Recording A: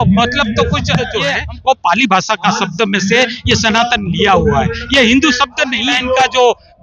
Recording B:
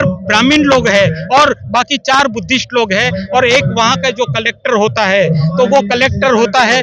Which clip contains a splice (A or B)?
A